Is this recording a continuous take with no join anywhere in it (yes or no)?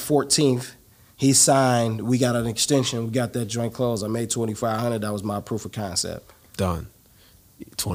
yes